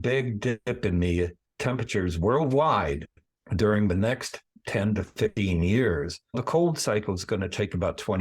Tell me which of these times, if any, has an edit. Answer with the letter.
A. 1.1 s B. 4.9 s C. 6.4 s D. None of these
C